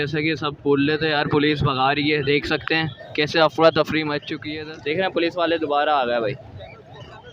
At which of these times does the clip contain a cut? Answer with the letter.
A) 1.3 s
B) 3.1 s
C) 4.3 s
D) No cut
C